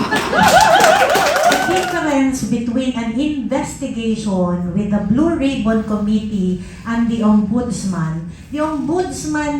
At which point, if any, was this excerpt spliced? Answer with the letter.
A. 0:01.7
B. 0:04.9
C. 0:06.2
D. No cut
A